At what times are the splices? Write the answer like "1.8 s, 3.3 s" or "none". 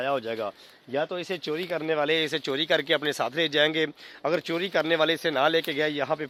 none